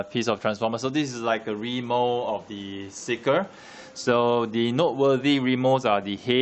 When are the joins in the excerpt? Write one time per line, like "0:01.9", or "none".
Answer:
0:03.2